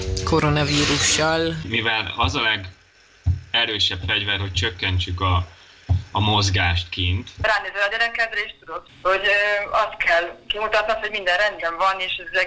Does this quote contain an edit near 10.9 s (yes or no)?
no